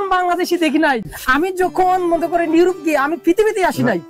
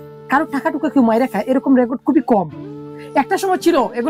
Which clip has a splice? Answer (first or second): first